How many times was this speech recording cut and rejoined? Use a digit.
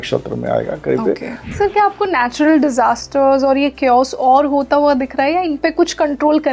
1